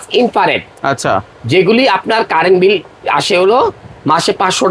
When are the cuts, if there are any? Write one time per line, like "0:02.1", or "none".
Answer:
none